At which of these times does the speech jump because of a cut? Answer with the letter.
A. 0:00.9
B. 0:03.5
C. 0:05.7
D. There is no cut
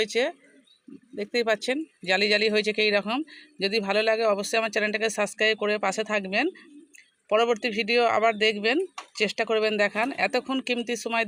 D